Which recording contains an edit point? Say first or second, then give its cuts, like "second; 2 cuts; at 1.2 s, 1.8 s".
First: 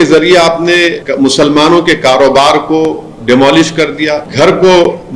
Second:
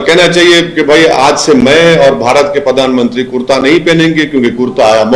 first; 2 cuts; at 1.0 s, 4.3 s